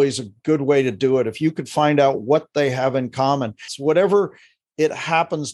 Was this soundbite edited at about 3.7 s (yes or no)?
yes